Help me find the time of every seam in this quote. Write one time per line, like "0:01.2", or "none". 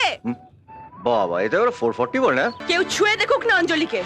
0:02.6

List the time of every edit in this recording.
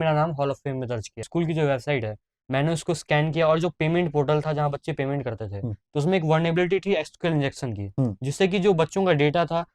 0:01.3

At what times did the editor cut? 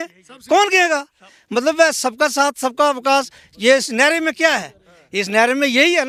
none

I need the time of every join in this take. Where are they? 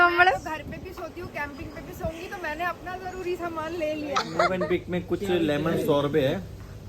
0:04.3

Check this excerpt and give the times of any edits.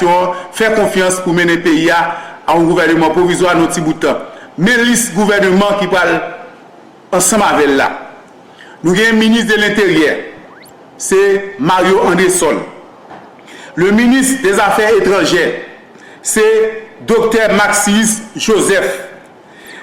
none

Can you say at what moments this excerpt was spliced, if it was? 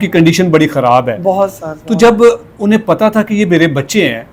none

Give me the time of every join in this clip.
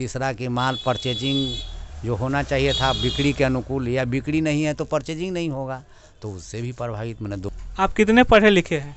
0:07.5

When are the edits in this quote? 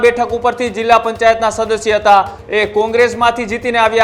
0:02.4

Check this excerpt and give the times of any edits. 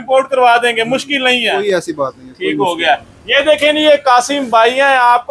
none

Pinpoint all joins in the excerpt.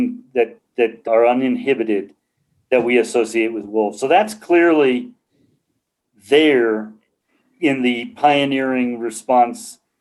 0:01.1

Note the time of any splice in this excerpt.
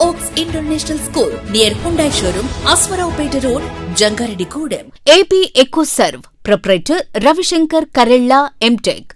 0:04.9

